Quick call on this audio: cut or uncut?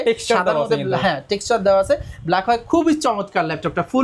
uncut